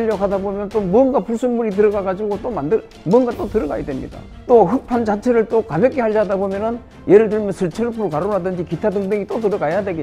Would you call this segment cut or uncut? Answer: cut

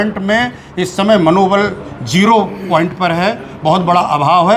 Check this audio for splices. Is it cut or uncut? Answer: uncut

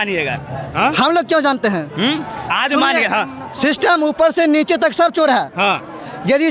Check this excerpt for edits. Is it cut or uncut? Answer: uncut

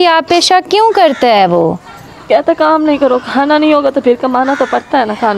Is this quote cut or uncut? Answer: uncut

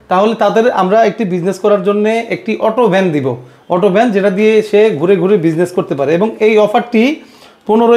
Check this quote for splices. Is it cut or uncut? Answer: uncut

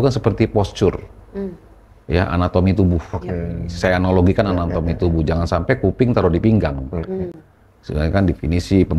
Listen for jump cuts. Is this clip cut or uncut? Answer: uncut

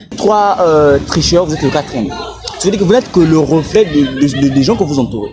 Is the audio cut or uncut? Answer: uncut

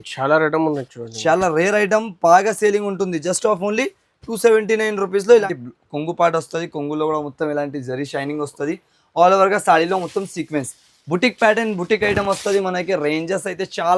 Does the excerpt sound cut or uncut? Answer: cut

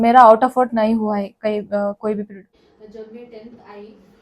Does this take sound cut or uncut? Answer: cut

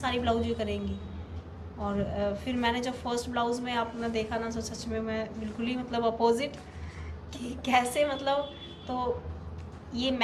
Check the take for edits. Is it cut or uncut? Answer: uncut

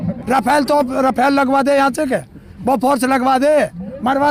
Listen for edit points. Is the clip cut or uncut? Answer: uncut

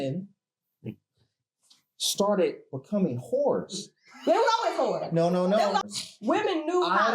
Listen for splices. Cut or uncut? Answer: cut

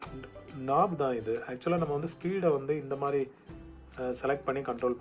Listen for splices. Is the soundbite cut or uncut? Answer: uncut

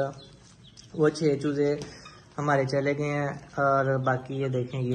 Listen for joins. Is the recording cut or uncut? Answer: uncut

